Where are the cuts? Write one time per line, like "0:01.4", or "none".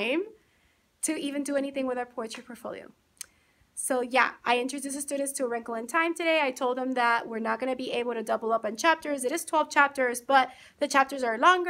none